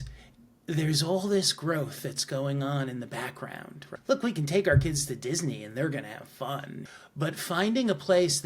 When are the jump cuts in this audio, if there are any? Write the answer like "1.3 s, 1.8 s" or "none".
3.9 s, 6.8 s

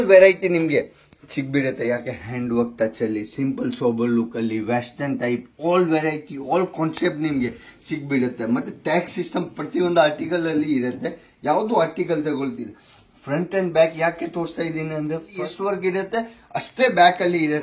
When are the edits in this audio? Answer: 15.3 s

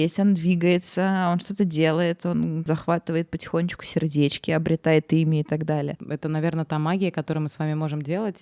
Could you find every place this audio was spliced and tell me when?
2.7 s, 6.0 s

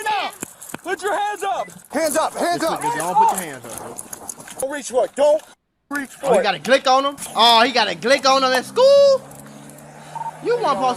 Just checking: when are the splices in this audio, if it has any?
1.8 s, 4.6 s, 7.2 s

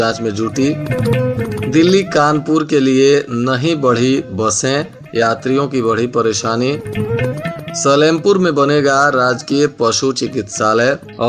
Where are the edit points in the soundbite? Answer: none

